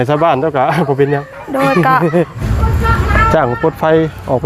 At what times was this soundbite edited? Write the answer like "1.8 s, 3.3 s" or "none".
2.4 s